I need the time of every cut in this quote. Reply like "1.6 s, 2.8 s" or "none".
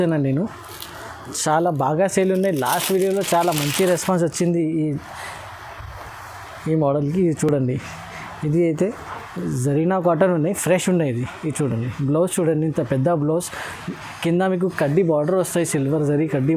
none